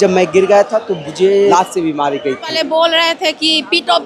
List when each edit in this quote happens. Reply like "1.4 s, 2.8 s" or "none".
1.5 s, 2.5 s